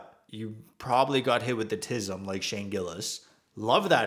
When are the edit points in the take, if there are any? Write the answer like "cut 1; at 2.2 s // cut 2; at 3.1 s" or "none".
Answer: none